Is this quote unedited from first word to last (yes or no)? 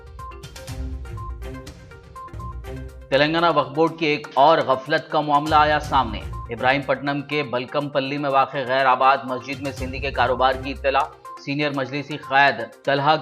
no